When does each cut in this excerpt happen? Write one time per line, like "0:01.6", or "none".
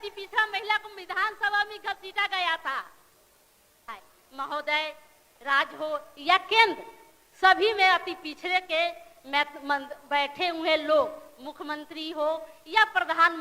0:03.9